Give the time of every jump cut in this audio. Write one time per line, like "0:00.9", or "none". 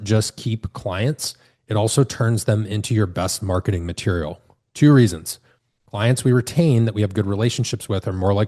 none